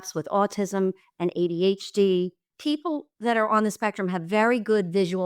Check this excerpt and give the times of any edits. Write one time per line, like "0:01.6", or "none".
0:02.4